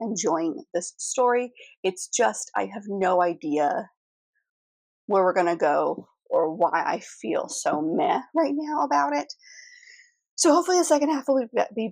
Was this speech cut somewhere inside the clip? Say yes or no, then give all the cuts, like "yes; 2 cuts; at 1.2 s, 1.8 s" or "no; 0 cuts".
no; 0 cuts